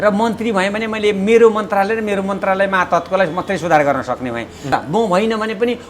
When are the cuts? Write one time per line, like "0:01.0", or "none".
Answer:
0:04.7